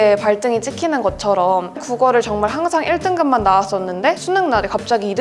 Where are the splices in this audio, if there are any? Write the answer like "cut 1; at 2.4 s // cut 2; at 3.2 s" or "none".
cut 1; at 1.8 s